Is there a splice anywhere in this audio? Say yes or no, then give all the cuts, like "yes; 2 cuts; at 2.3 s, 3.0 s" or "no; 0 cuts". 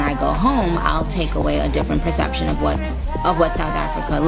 no; 0 cuts